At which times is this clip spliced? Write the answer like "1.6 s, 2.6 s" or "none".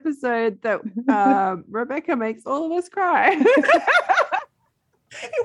none